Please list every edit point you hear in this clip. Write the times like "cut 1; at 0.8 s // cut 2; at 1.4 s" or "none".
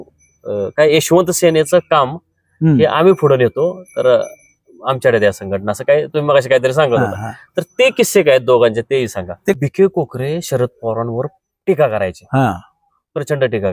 cut 1; at 9.5 s